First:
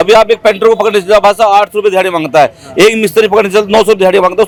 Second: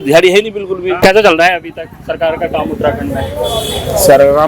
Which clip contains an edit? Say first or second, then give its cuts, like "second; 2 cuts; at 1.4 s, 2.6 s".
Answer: second; 1 cut; at 1.0 s